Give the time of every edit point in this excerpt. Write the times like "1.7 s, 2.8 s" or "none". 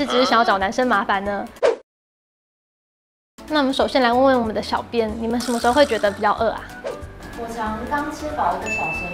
none